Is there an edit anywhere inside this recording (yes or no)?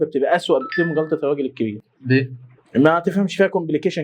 no